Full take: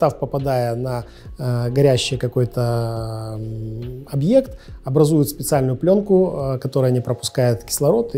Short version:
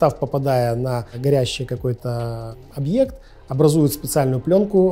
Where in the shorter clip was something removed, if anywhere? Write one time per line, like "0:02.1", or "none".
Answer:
0:01.1
0:02.6